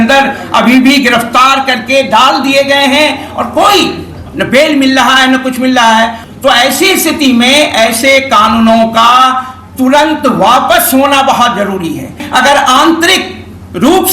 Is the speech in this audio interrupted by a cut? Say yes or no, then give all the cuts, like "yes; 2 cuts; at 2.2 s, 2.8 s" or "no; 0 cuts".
yes; 2 cuts; at 6.2 s, 12.2 s